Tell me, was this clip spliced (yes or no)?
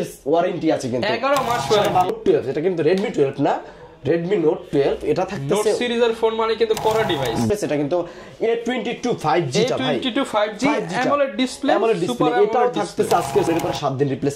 yes